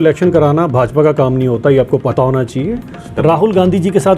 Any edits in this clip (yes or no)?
yes